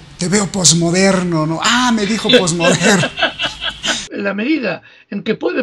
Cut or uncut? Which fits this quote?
cut